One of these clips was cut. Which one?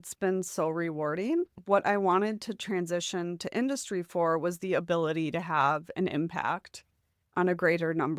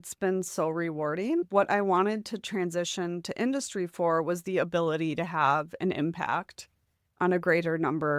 second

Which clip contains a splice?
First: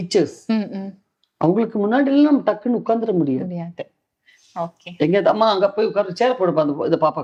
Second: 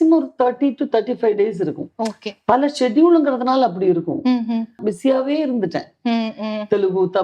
second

